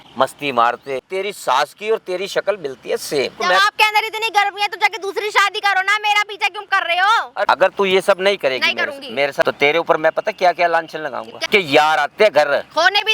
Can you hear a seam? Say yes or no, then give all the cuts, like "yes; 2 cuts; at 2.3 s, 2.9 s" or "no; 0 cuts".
yes; 5 cuts; at 1.1 s, 3.4 s, 7.5 s, 9.4 s, 11.4 s